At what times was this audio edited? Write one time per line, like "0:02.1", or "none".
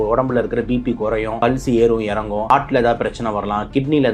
0:01.4
0:02.5